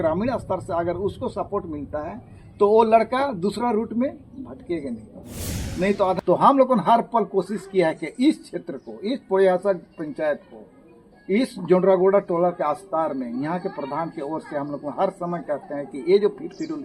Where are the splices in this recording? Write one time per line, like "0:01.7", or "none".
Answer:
0:06.2